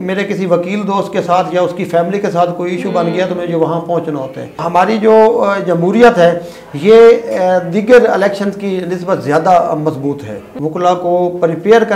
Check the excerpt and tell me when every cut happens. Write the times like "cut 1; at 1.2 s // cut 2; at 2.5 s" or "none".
cut 1; at 4.6 s // cut 2; at 10.4 s